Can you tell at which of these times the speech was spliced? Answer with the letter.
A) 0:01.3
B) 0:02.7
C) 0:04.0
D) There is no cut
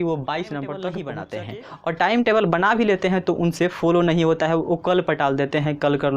A